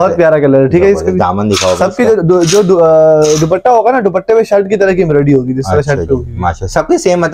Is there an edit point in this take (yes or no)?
no